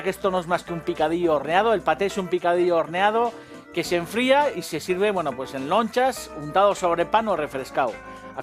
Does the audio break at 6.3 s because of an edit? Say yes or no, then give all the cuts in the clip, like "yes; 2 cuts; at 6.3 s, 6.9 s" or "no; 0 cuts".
no; 1 cut; at 4.0 s